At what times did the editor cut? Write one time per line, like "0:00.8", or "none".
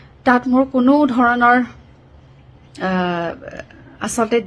none